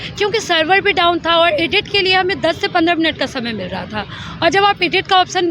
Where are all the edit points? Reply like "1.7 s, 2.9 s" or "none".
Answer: none